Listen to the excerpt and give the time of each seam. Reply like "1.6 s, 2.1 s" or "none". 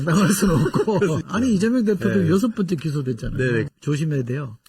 1.2 s, 3.7 s